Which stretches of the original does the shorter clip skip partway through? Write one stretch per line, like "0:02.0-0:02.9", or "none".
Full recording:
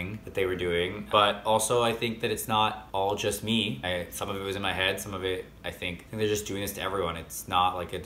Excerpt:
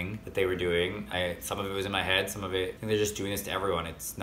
0:01.0-0:03.7
0:05.5-0:06.1